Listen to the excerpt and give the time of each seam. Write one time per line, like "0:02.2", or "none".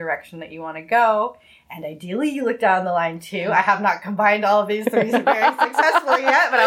none